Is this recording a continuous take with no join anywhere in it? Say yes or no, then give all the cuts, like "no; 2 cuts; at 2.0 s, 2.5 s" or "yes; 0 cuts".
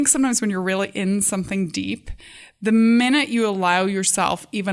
yes; 0 cuts